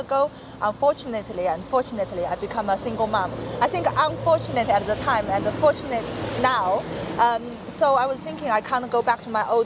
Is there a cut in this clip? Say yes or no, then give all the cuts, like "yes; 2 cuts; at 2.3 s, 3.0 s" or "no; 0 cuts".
no; 0 cuts